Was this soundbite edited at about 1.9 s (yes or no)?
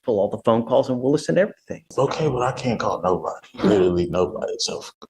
yes